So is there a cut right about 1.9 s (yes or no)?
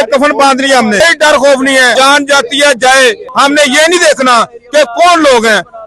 yes